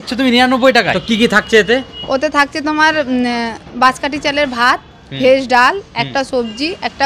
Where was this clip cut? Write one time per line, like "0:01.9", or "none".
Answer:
0:01.0